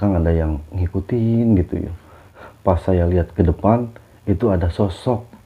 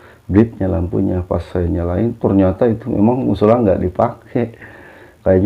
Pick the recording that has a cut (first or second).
first